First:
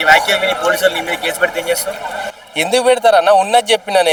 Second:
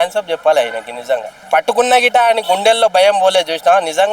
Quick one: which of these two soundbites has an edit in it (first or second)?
second